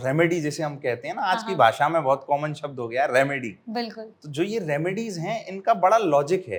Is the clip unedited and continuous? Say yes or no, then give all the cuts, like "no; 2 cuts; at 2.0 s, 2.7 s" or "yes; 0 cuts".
yes; 0 cuts